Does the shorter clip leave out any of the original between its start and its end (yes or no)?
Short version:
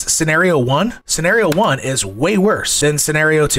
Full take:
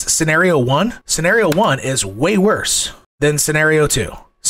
yes